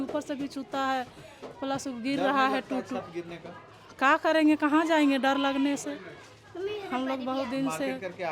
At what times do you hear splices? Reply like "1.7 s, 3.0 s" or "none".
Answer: none